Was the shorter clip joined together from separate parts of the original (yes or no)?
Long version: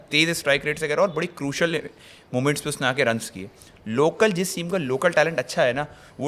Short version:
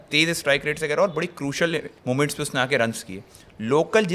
yes